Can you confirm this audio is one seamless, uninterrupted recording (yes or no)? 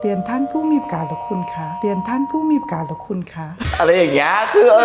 yes